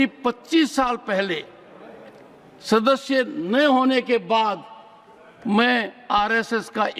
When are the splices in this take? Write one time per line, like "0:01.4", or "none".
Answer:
none